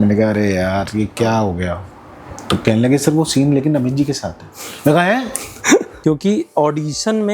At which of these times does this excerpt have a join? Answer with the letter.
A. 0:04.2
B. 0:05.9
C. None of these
B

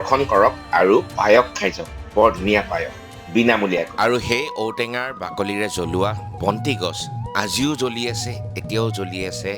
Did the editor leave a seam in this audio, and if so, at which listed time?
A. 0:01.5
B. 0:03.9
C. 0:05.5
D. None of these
B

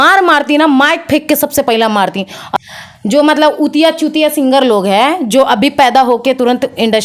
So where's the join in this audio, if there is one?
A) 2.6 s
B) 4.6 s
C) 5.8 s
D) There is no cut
A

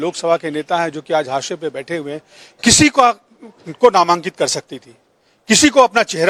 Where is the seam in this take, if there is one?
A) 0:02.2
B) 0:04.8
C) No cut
C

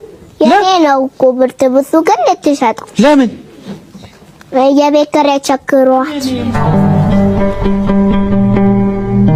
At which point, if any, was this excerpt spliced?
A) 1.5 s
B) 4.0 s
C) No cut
C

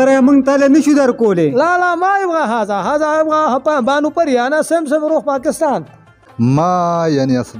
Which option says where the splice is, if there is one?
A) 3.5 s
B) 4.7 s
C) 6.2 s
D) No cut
C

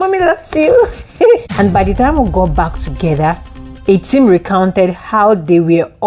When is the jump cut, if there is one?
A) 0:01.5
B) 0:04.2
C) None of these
A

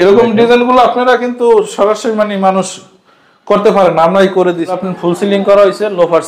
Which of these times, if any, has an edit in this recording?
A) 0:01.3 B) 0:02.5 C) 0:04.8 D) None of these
C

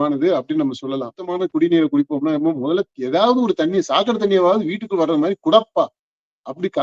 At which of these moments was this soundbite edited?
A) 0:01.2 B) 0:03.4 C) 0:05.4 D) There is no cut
A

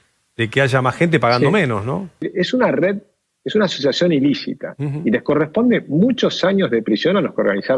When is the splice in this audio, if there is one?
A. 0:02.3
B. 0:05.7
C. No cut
A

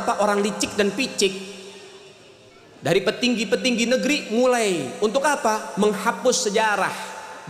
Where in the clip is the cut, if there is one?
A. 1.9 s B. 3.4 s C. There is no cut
C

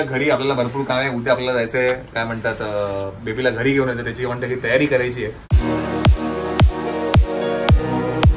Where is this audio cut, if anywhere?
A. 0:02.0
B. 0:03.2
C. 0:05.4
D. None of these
C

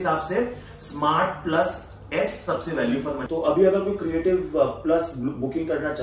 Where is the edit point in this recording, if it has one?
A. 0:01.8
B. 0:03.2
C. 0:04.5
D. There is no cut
B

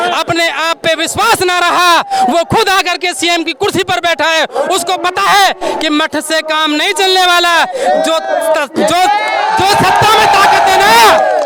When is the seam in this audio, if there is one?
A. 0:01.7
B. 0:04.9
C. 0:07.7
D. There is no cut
D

